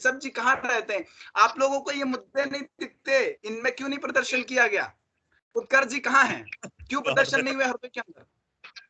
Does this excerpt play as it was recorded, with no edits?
yes; 0 cuts

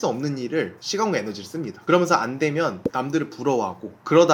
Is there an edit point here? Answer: no; 0 cuts

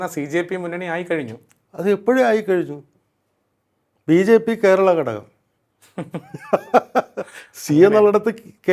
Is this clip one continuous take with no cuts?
yes; 0 cuts

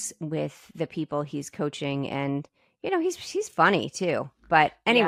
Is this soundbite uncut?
yes; 0 cuts

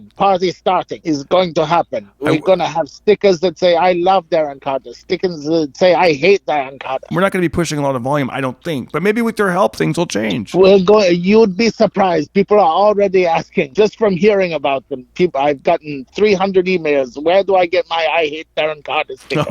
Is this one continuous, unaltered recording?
no; 3 cuts; at 0.9 s, 7.1 s, 13.7 s

